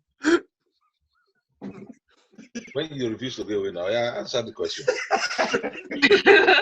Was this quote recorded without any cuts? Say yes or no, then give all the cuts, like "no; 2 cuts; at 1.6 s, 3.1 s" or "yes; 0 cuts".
no; 1 cut; at 2.7 s